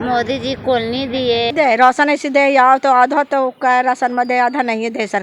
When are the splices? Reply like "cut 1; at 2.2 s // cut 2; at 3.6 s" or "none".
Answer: cut 1; at 1.5 s